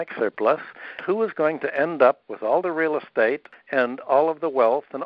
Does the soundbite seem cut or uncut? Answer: cut